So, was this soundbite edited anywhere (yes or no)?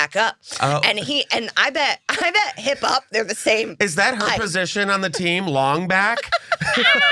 no